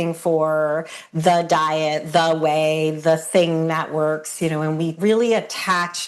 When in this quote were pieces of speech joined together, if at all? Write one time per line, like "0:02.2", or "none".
0:05.0